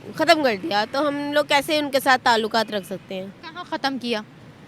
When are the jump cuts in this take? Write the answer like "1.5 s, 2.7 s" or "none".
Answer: none